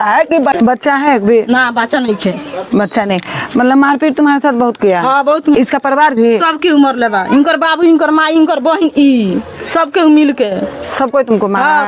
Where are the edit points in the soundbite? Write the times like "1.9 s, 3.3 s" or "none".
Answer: none